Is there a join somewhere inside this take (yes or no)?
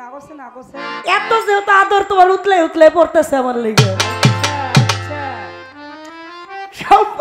no